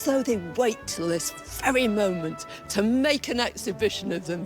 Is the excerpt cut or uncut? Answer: uncut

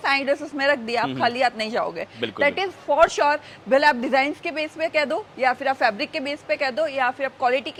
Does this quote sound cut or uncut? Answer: uncut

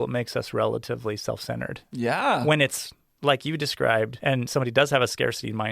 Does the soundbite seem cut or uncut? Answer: cut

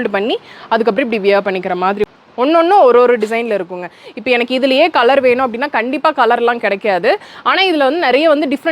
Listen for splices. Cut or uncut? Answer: cut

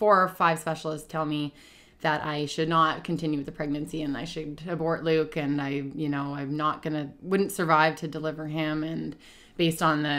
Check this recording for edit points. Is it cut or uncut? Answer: uncut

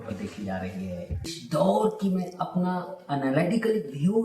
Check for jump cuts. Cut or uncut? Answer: cut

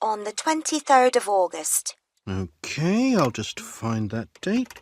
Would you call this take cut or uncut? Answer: uncut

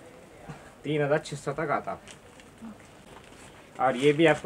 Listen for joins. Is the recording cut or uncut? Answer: cut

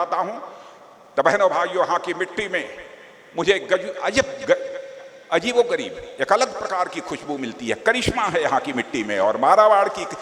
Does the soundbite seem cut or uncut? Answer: uncut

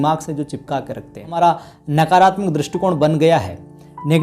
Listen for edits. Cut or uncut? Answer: cut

